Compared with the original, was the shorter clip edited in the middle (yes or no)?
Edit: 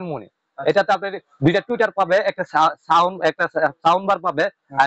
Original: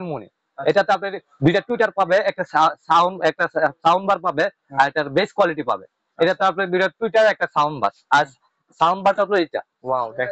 no